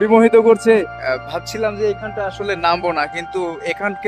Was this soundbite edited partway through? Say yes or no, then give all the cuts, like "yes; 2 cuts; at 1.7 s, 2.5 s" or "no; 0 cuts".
yes; 1 cut; at 1.0 s